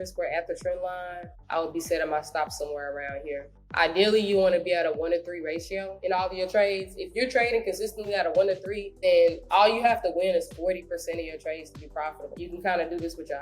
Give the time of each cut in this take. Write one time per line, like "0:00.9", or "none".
0:01.3
0:05.9
0:08.8
0:12.3